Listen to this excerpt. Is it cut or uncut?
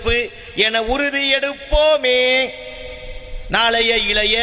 uncut